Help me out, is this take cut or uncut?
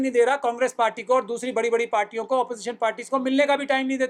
uncut